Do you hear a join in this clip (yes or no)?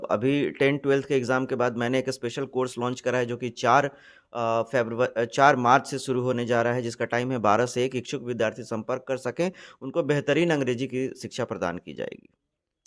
no